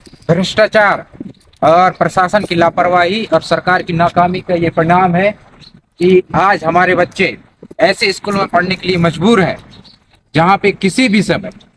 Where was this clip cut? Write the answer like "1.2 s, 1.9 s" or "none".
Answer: none